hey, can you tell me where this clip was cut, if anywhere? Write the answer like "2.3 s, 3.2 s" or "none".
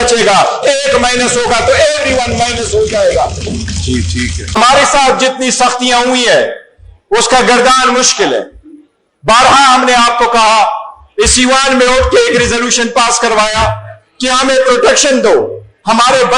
4.6 s